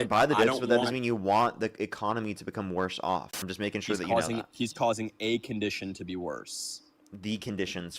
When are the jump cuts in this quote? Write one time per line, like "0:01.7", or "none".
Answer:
0:03.4